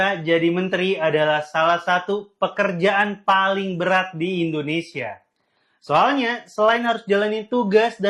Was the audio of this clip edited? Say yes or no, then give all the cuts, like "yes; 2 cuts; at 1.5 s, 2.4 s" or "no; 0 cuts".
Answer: no; 0 cuts